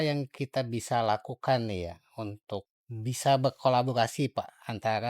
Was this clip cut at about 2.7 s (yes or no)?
yes